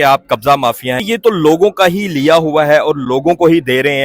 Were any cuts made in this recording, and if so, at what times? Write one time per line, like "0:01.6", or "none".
0:01.0